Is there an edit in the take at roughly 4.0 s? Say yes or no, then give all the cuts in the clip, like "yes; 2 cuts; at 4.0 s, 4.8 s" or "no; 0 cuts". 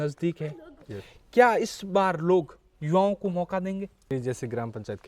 yes; 1 cut; at 4.0 s